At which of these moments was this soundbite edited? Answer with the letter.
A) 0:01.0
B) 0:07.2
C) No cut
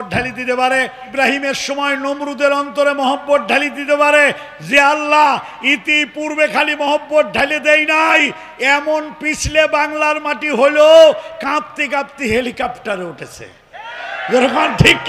A